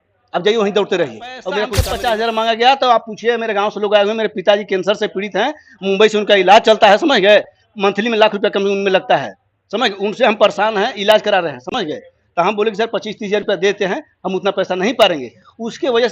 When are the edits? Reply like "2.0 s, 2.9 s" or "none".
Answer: 1.8 s

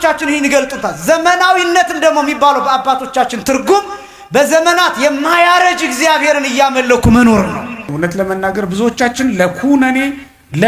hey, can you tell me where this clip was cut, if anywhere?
7.8 s

